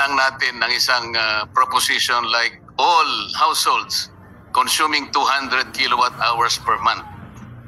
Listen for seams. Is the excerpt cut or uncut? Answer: uncut